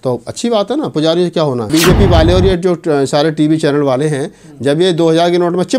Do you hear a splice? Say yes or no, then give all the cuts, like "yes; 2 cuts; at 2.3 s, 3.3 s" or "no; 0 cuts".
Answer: yes; 1 cut; at 1.7 s